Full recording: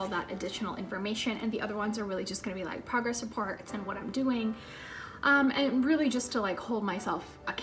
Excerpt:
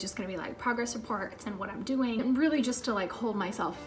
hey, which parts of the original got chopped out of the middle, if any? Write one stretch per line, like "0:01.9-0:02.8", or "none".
0:04.5-0:05.7

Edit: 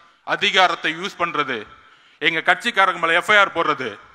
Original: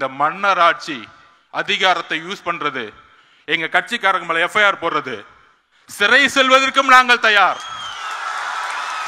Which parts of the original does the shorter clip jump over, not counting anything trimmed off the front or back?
none

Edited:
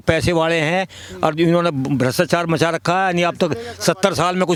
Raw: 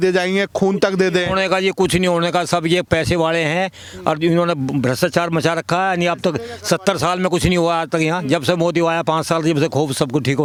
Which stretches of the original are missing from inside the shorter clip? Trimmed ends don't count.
none

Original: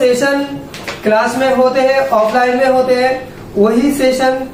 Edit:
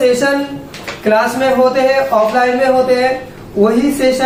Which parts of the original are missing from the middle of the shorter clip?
none

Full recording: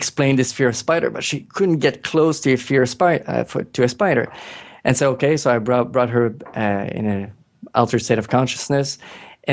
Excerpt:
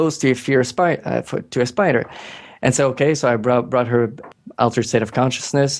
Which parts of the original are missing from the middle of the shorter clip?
0:06.4-0:07.4

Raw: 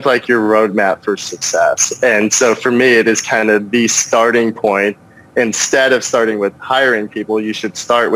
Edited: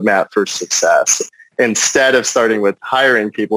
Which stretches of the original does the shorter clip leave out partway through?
0:01.9-0:05.0

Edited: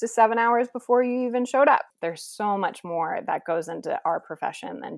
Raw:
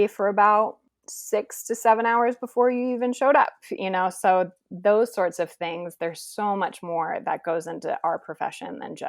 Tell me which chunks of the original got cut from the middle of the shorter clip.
0:03.6-0:05.9

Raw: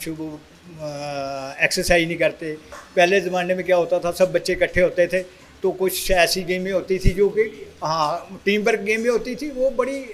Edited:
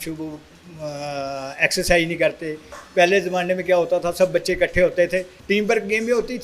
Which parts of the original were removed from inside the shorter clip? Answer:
0:05.3-0:08.3

